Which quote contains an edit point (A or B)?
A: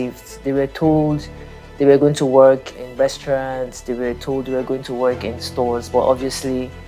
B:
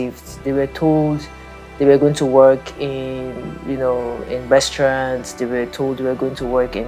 A